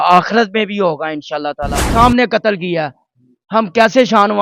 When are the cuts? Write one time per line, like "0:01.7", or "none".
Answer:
0:01.9

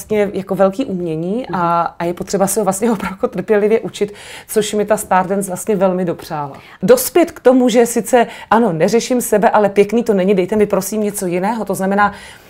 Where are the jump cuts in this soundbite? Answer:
0:06.8

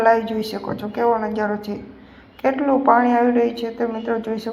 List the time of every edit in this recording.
0:02.5

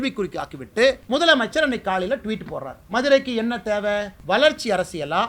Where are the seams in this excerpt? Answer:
0:01.0
0:04.1

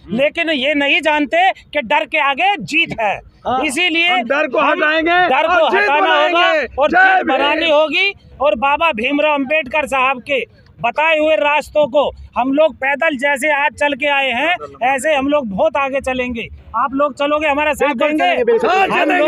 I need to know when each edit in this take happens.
none

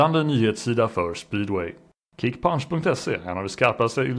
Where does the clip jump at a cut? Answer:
0:02.1

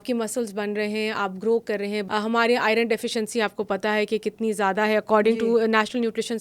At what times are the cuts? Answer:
0:02.0

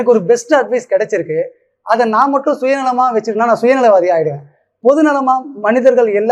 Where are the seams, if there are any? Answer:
none

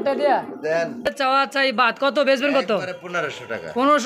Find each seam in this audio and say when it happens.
0:01.1

